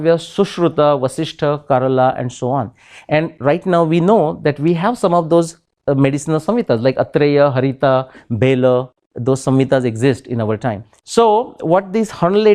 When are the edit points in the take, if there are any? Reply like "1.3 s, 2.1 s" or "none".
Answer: 10.9 s